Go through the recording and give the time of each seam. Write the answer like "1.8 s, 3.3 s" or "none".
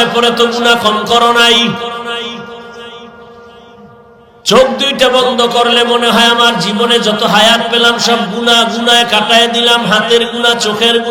none